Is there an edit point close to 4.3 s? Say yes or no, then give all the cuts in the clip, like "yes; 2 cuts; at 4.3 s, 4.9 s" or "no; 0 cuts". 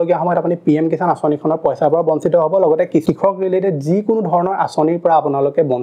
no; 0 cuts